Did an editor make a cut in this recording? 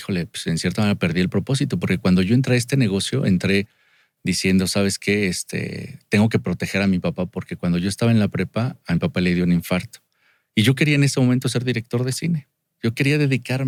no; 0 cuts

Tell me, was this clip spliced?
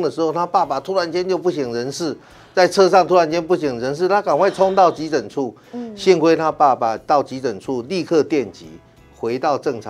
no; 0 cuts

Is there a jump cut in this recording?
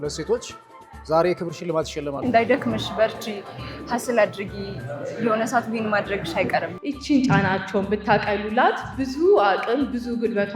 yes; 2 cuts; at 2.2 s, 6.7 s

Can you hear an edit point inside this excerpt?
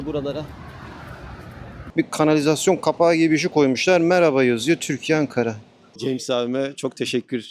yes; 2 cuts; at 1.9 s, 5.9 s

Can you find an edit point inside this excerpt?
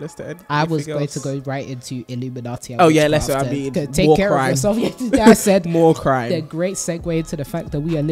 no; 0 cuts

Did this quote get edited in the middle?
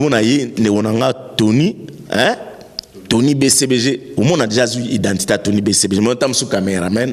no; 0 cuts

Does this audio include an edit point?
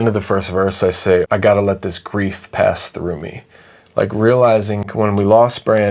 yes; 2 cuts; at 1.3 s, 4.8 s

